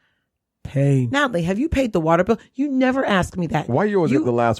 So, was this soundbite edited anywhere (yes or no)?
yes